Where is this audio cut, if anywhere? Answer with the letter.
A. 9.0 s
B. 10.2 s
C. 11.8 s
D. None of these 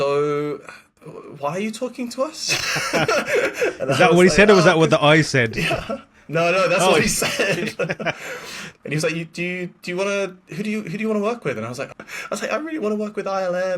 C